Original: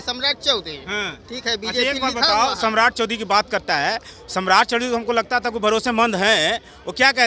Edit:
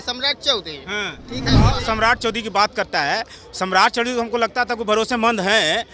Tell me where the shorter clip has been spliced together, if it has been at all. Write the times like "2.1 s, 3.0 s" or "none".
1.6 s

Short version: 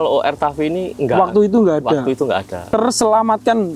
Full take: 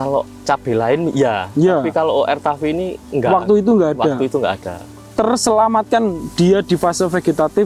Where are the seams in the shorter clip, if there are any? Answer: 0.9 s, 2.5 s

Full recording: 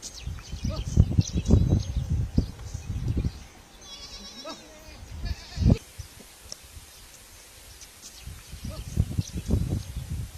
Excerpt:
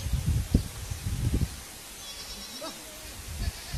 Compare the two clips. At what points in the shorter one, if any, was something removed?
none

